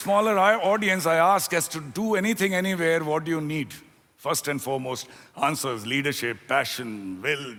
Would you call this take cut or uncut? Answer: uncut